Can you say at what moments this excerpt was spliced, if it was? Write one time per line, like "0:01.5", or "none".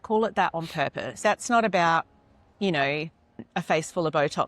0:01.2
0:03.4